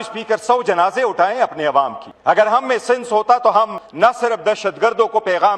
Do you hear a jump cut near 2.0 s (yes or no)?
yes